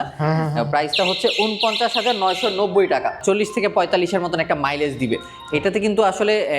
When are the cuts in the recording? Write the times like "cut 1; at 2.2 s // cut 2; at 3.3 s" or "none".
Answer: cut 1; at 3.2 s

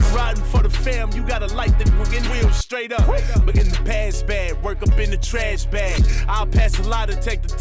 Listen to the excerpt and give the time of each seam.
none

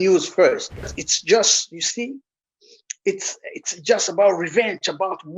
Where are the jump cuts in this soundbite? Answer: cut 1; at 1.0 s

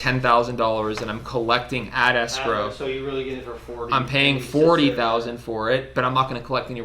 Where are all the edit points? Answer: cut 1; at 5.9 s

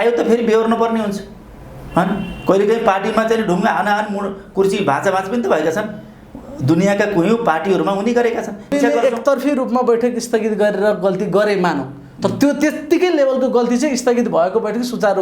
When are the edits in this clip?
cut 1; at 8.7 s

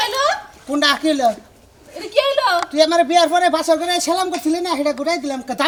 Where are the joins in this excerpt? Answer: none

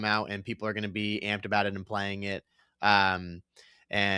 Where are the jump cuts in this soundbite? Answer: none

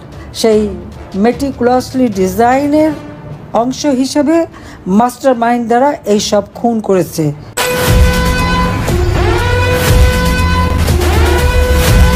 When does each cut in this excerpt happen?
cut 1; at 7.5 s

